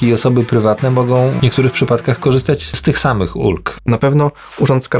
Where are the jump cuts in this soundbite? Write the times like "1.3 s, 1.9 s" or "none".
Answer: 1.4 s, 2.8 s, 3.8 s